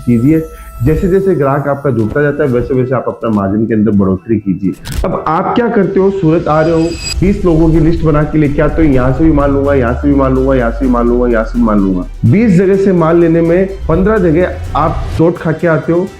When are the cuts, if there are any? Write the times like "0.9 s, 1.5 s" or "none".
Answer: 4.9 s